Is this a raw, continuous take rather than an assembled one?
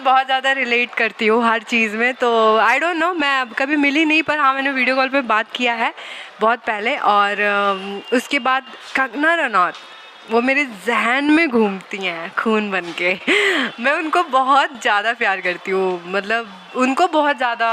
yes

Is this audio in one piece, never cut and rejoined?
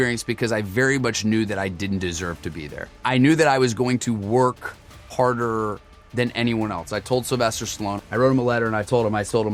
yes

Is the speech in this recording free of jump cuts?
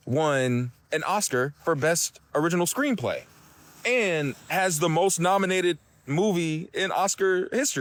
yes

